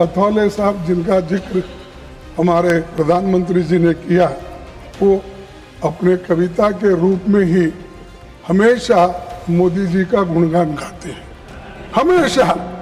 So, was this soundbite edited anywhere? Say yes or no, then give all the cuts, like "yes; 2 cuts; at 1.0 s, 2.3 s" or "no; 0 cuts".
no; 0 cuts